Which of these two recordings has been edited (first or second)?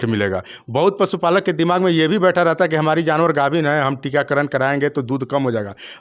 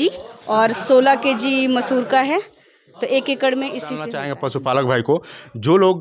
second